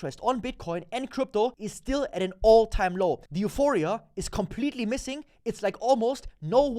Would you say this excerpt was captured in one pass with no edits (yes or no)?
no